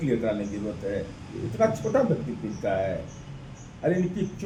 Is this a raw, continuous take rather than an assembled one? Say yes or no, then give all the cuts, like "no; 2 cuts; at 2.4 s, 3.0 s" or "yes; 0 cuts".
yes; 0 cuts